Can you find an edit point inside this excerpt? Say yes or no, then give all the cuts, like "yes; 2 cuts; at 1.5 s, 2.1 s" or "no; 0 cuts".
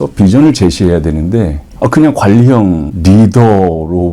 yes; 2 cuts; at 1.6 s, 2.9 s